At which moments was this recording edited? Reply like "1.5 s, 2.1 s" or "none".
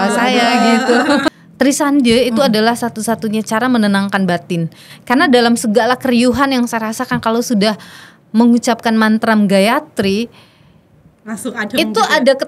1.2 s